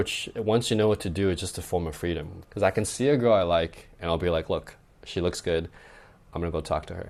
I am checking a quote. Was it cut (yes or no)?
no